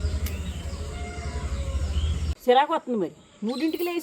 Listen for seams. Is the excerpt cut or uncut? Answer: cut